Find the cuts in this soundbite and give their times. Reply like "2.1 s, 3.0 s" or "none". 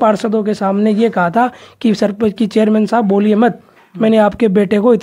none